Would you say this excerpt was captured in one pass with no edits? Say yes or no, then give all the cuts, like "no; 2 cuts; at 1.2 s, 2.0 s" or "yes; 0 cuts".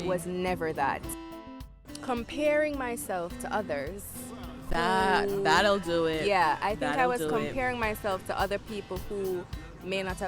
no; 1 cut; at 1.4 s